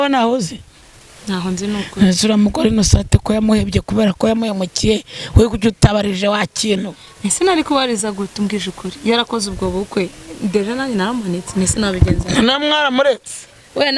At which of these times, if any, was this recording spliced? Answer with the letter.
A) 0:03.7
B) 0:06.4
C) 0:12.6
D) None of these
D